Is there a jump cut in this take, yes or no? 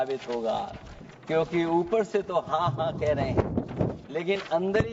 no